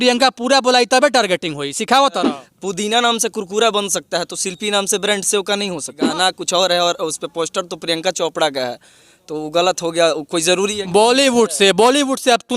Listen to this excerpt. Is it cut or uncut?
cut